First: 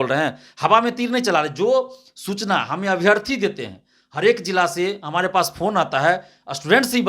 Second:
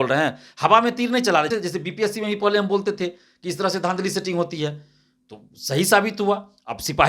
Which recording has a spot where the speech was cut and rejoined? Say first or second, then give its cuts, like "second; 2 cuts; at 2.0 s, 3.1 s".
second; 1 cut; at 1.5 s